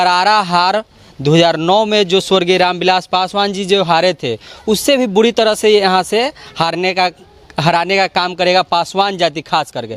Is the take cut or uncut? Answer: uncut